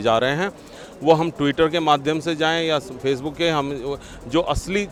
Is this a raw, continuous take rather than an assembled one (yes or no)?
yes